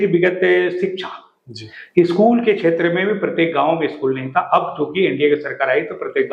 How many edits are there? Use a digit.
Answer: 0